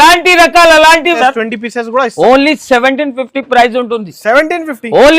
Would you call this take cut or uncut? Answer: cut